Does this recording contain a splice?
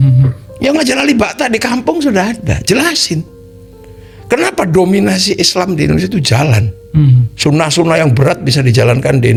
no; 0 cuts

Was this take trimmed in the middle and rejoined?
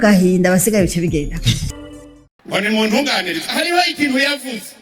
yes; 1 cut; at 1.7 s

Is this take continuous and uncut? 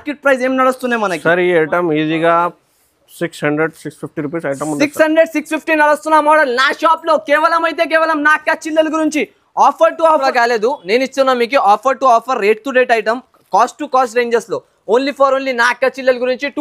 no; 1 cut; at 10.2 s

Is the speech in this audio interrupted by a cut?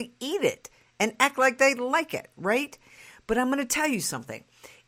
no; 0 cuts

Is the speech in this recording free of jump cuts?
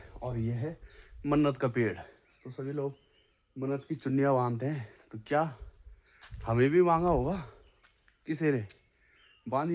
yes; 0 cuts

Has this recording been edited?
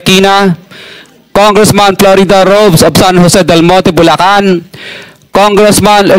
no; 0 cuts

